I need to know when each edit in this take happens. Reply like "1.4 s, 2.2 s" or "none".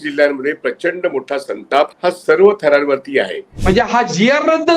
1.9 s, 3.5 s